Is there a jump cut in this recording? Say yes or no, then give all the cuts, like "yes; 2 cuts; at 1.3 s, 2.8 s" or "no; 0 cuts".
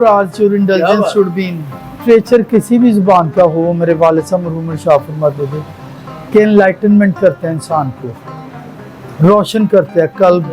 yes; 1 cut; at 2.0 s